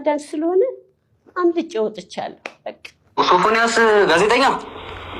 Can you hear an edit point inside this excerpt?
yes; 1 cut; at 3.1 s

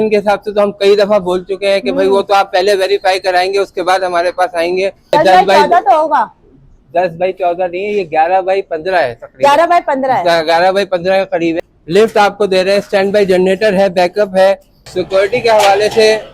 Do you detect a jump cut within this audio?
yes; 3 cuts; at 5.1 s, 11.6 s, 15.0 s

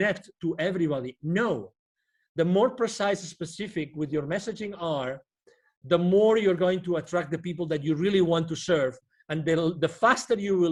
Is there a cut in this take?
no; 0 cuts

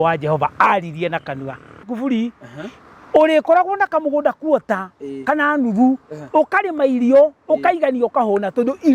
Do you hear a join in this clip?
yes; 1 cut; at 1.9 s

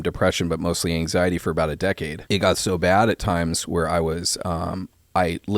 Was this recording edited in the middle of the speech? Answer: yes; 1 cut; at 2.1 s

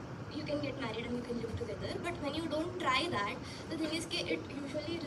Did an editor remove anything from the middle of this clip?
no; 0 cuts

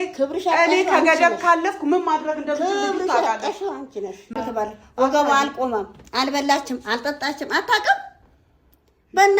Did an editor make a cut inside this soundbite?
yes; 1 cut; at 4.3 s

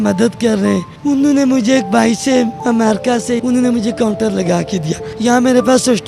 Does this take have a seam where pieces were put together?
yes; 3 cuts; at 0.9 s, 2.8 s, 5.0 s

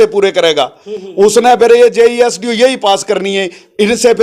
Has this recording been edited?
no; 0 cuts

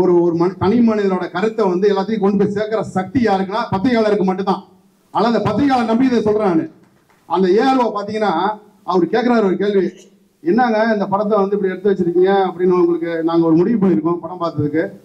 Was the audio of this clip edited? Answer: no; 0 cuts

